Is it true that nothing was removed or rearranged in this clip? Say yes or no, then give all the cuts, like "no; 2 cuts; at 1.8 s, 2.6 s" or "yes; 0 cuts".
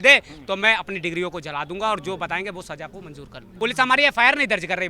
no; 1 cut; at 3.4 s